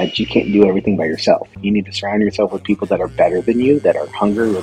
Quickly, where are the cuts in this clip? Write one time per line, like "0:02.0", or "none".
0:01.6